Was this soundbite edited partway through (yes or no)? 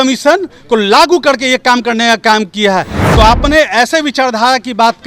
yes